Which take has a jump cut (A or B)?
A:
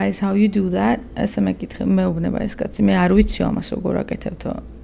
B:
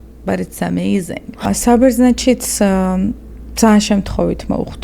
B